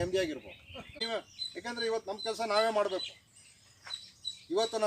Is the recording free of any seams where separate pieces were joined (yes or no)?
no